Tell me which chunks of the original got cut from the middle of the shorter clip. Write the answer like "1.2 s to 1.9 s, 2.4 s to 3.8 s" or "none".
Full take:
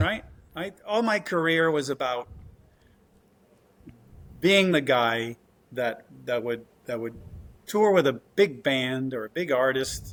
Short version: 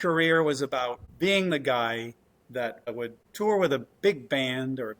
2.3 s to 4.3 s, 6.1 s to 7.2 s